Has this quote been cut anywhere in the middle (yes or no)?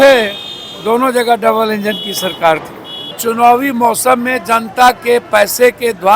yes